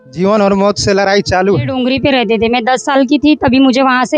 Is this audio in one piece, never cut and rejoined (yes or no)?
no